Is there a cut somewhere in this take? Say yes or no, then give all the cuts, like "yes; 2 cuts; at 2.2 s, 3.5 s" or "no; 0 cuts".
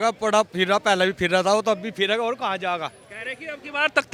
no; 0 cuts